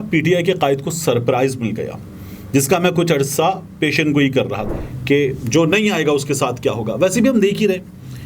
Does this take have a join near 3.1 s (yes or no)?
no